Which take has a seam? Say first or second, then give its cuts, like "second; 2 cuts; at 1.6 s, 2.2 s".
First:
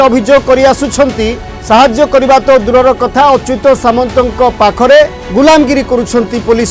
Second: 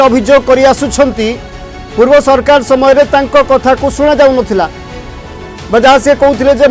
first; 2 cuts; at 1.5 s, 5.2 s